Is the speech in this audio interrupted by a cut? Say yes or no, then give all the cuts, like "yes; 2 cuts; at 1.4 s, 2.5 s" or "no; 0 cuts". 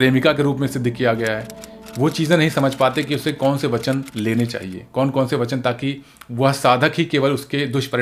no; 0 cuts